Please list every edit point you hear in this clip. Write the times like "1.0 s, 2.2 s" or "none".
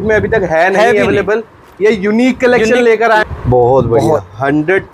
3.2 s